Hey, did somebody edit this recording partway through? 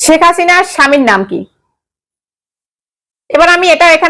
no; 0 cuts

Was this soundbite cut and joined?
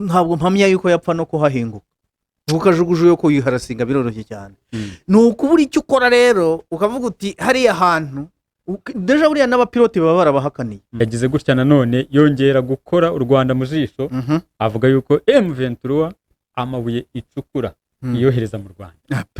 yes; 1 cut; at 10.8 s

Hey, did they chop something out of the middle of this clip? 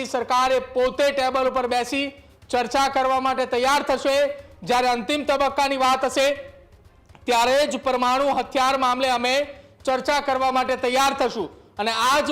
no; 0 cuts

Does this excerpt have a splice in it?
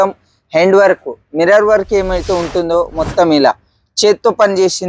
no; 0 cuts

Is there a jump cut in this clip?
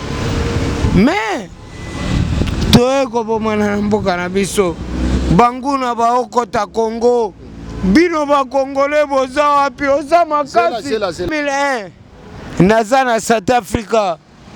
yes; 1 cut; at 11.3 s

